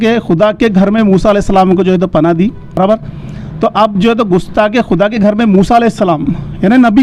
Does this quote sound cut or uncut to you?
cut